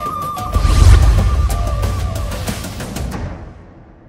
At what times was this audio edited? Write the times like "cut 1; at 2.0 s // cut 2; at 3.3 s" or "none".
none